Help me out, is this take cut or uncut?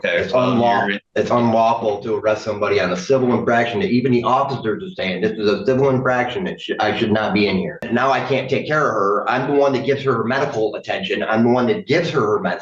cut